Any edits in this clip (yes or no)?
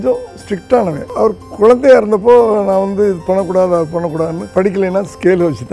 yes